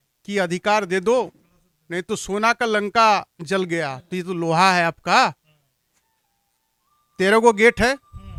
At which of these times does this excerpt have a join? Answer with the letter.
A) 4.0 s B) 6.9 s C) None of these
C